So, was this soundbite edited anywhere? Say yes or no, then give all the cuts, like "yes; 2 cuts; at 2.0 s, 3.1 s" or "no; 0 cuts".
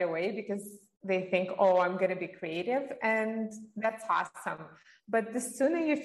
no; 0 cuts